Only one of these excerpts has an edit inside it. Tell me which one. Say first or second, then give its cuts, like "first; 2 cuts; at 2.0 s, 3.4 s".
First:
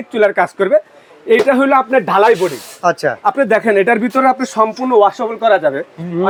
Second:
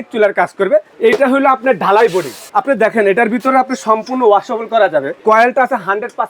second; 3 cuts; at 0.9 s, 2.4 s, 5.2 s